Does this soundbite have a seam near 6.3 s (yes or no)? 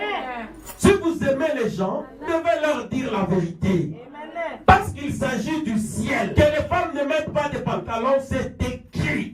yes